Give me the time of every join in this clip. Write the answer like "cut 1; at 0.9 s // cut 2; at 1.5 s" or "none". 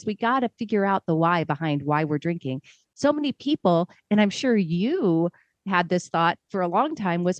none